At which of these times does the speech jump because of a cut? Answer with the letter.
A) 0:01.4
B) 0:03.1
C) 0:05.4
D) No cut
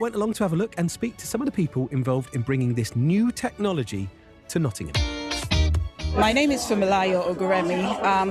C